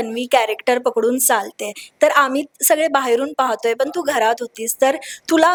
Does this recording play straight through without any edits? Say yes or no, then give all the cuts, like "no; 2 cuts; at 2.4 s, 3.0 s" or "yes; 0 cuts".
yes; 0 cuts